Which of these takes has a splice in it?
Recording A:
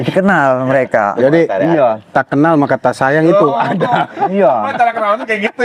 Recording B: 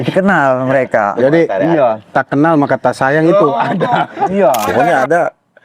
B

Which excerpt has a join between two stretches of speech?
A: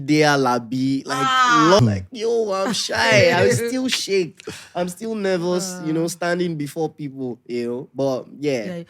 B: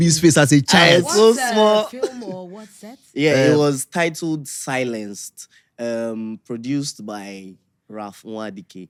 A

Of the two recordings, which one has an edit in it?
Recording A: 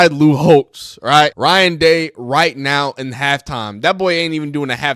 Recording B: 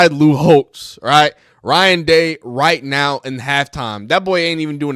A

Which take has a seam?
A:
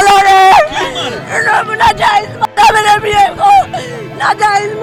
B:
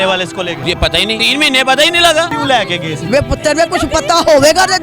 B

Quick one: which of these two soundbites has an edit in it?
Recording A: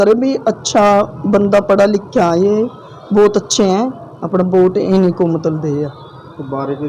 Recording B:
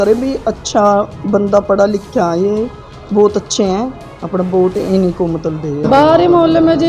B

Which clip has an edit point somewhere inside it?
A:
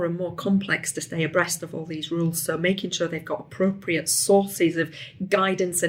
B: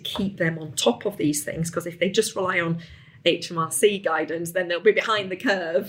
B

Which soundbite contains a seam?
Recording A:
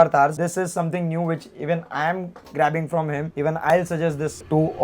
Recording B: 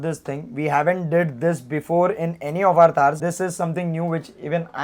A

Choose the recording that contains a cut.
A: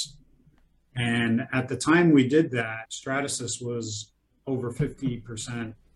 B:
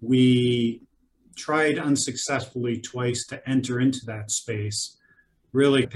A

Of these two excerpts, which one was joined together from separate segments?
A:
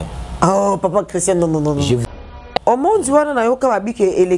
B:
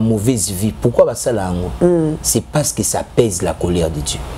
A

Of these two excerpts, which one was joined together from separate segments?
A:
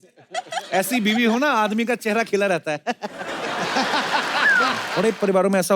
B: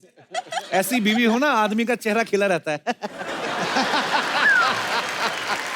A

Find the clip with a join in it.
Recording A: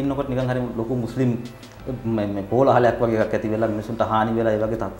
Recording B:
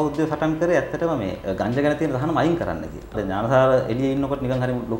B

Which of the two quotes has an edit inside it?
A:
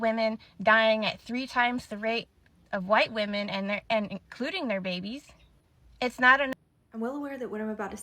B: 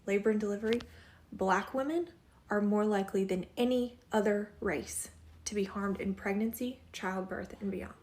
A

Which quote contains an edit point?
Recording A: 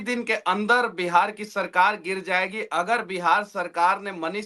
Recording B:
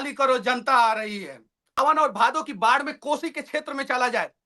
B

